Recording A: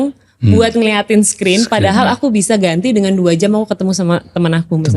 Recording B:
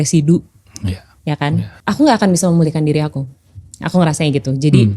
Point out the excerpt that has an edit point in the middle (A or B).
B